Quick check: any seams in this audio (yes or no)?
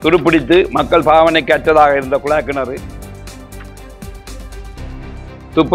no